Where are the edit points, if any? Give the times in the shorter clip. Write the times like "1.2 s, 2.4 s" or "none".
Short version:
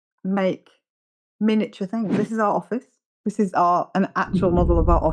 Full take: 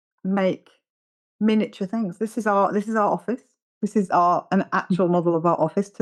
2.2 s